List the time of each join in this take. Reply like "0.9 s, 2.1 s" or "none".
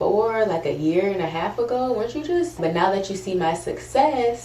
2.6 s